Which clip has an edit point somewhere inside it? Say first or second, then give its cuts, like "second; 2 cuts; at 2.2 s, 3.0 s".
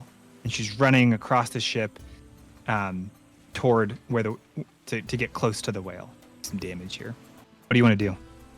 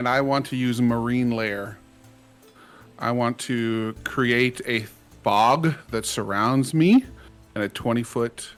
first; 1 cut; at 6.5 s